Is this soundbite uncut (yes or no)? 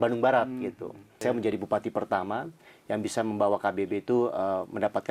no